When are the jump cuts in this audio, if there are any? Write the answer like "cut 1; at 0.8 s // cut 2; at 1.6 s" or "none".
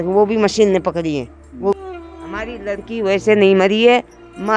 cut 1; at 1.7 s